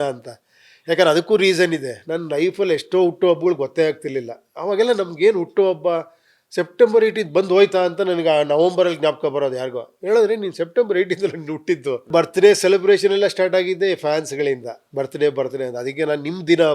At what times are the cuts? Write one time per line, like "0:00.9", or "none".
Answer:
0:12.1

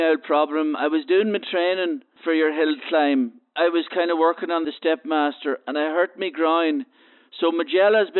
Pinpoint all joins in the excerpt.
0:02.1
0:03.5
0:04.7

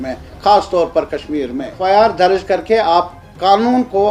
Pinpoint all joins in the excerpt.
0:01.8

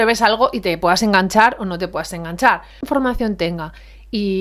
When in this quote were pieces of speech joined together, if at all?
0:02.9

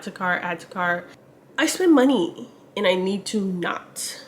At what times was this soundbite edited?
0:01.1

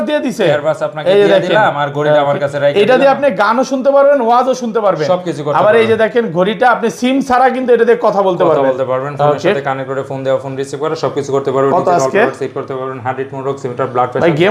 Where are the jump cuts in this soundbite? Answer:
none

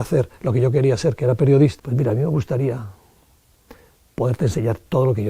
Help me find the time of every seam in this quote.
0:01.8

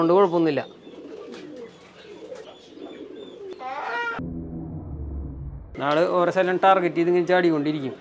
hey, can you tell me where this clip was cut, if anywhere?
0:02.5
0:03.5

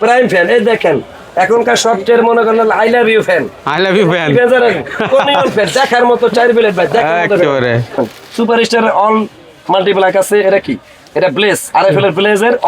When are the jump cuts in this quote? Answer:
0:08.0

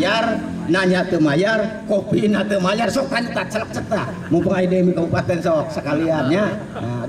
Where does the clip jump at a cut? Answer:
none

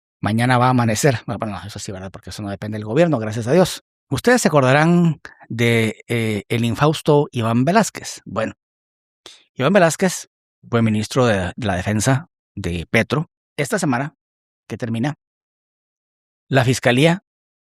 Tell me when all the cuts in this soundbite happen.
0:04.1
0:13.5

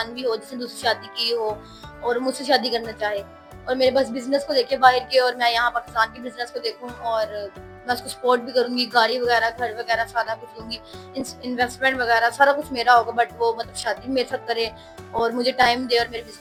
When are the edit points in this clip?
none

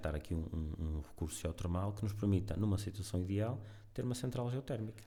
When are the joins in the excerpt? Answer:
none

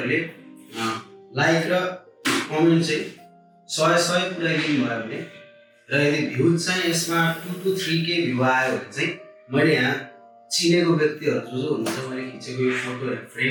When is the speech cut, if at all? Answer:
none

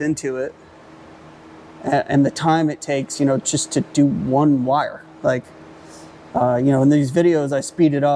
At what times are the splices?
none

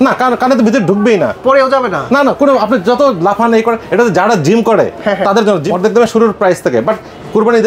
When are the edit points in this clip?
0:05.7

